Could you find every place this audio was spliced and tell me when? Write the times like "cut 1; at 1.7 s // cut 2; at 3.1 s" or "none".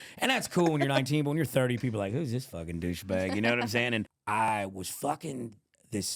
cut 1; at 4.4 s